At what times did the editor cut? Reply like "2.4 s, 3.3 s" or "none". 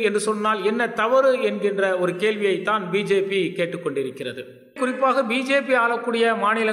4.7 s